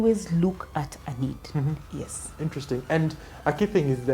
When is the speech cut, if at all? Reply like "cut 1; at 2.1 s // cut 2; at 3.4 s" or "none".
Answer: none